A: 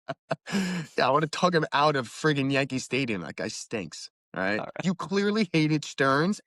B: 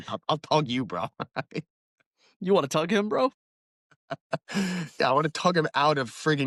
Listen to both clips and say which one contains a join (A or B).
A